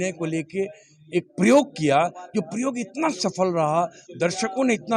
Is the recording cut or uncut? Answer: uncut